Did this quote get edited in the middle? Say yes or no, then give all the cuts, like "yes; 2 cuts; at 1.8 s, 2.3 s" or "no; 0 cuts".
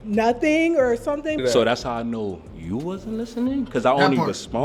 yes; 1 cut; at 1.4 s